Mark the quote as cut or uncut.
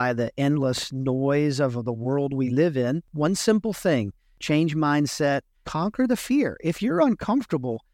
cut